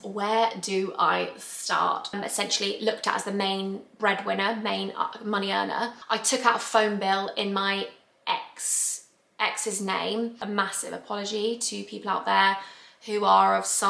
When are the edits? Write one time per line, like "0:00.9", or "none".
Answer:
0:02.1
0:06.0
0:10.4